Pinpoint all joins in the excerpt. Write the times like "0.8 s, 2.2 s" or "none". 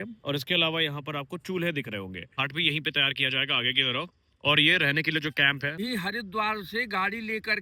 2.4 s, 5.8 s